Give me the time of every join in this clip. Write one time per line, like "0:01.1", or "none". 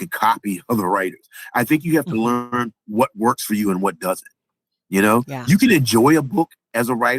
none